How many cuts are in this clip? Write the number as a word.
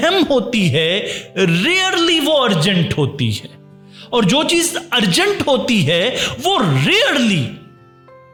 zero